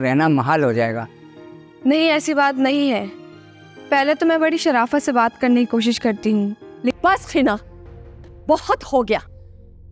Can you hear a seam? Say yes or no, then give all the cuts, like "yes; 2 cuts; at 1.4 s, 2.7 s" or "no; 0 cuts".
yes; 1 cut; at 6.9 s